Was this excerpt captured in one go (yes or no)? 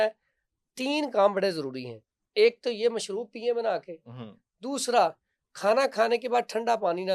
yes